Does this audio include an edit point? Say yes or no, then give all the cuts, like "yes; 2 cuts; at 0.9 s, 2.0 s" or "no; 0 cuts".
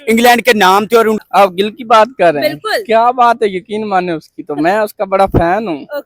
yes; 1 cut; at 1.2 s